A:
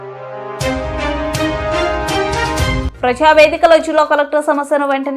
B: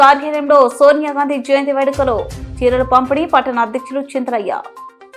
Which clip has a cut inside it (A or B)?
A